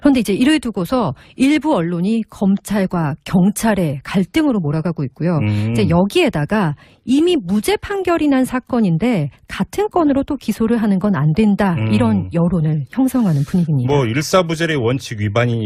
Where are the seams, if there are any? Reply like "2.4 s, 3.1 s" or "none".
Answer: 8.8 s